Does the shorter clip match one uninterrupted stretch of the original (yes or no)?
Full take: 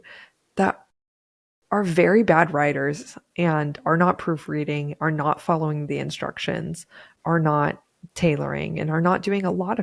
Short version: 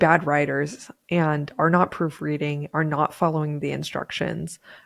yes